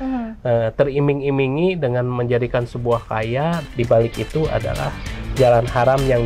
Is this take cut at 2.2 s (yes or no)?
no